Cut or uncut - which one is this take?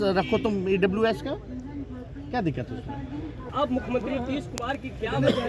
cut